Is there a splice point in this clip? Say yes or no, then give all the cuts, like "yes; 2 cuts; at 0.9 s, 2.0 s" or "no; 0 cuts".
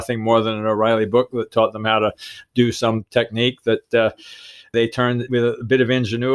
yes; 1 cut; at 4.8 s